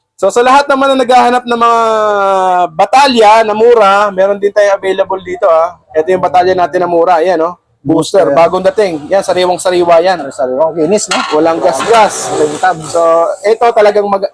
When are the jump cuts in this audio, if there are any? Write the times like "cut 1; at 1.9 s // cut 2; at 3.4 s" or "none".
none